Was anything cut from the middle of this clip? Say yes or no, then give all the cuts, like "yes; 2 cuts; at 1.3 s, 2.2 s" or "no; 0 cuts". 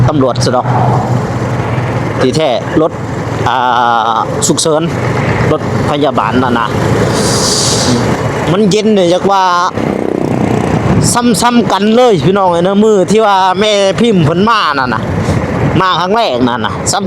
yes; 1 cut; at 7.9 s